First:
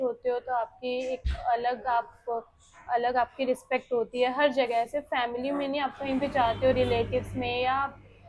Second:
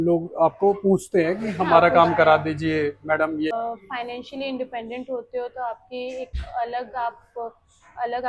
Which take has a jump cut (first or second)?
second